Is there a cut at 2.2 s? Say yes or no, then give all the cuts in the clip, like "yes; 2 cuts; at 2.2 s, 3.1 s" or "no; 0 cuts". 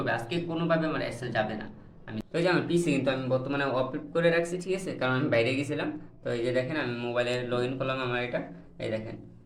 yes; 1 cut; at 2.2 s